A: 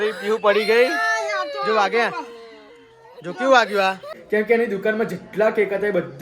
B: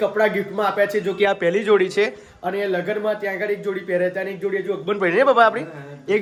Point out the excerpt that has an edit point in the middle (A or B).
A